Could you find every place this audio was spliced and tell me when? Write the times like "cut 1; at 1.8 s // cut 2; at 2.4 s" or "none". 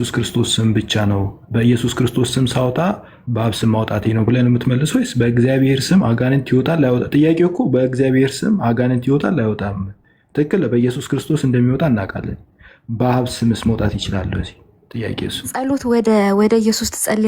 cut 1; at 15.4 s